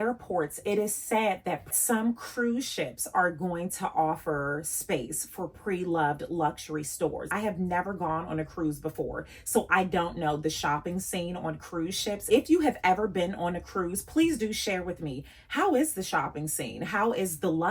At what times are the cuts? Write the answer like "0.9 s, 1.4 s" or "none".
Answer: none